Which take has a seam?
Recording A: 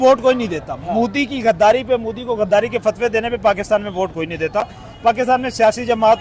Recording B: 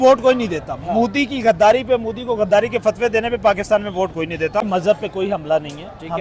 B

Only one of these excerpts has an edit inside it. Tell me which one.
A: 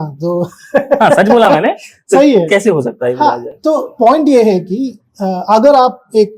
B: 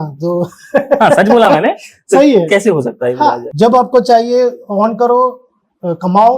B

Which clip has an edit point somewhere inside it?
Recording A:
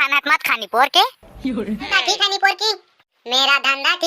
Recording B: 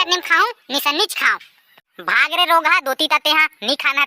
A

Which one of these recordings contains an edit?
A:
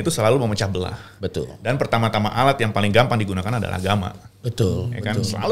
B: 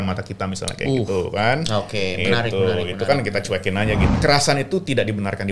B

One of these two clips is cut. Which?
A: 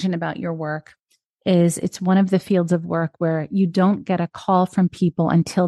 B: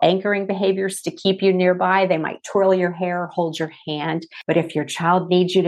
B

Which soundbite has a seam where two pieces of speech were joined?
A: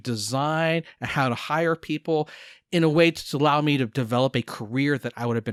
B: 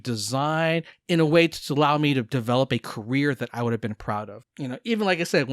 B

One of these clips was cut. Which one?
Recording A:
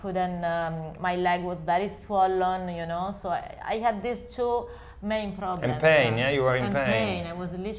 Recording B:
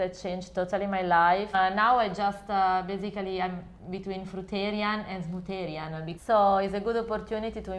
B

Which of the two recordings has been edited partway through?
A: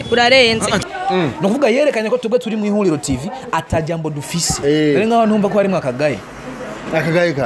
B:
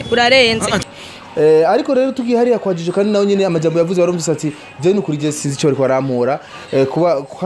A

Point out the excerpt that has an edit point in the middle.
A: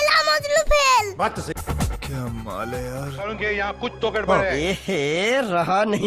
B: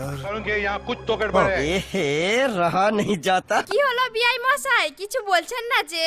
A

